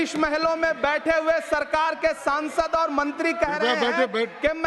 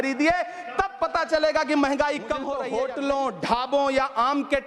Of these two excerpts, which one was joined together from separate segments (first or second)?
second